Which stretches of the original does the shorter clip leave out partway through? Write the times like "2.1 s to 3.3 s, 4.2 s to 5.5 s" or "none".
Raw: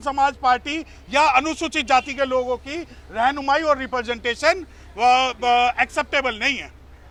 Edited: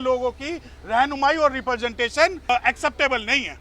4.8 s to 5.6 s